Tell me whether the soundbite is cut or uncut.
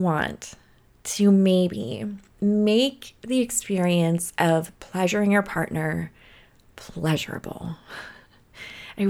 uncut